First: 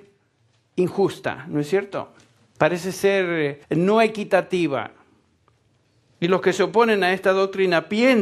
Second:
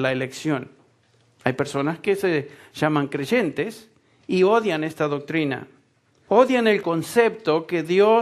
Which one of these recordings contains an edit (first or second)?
first